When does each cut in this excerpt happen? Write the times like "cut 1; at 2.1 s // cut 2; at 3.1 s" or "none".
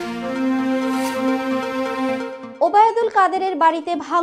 cut 1; at 2.4 s